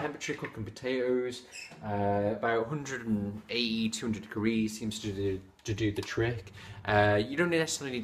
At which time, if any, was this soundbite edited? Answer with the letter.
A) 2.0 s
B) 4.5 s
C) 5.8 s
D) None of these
C